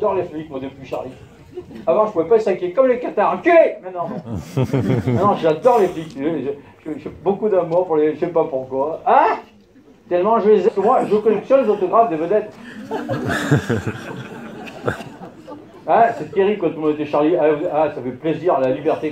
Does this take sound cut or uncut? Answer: uncut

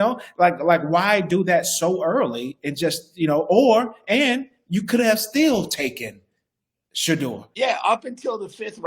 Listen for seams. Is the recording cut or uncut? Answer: cut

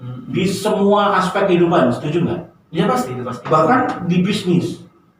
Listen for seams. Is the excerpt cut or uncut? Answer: uncut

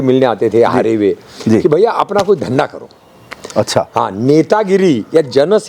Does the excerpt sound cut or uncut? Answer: uncut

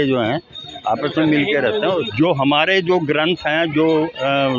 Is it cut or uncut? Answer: cut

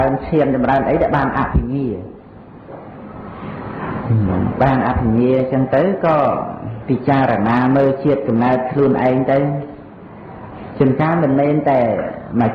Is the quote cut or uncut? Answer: uncut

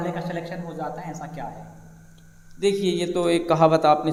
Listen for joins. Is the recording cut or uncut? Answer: uncut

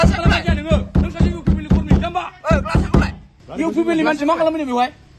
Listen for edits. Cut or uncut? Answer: cut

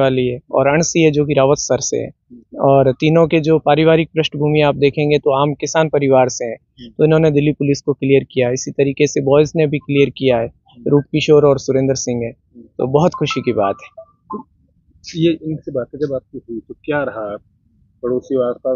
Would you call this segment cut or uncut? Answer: uncut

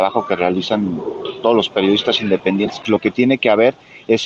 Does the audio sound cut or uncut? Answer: cut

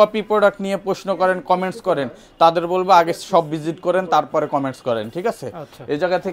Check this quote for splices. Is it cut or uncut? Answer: uncut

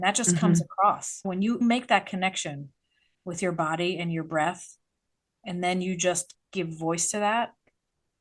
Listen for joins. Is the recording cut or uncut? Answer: uncut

